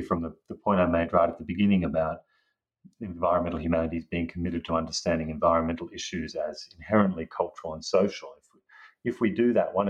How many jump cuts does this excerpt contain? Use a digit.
0